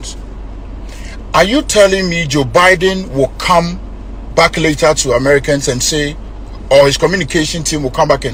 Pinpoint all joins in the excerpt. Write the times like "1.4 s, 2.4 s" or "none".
none